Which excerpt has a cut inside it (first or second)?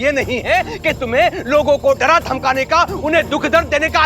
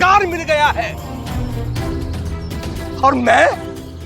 second